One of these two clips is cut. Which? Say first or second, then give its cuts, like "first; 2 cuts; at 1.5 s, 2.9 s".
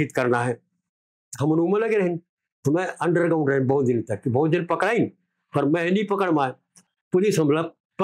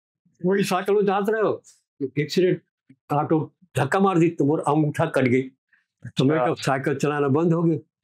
first; 1 cut; at 6.9 s